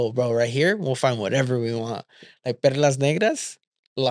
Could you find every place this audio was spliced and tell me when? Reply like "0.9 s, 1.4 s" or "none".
none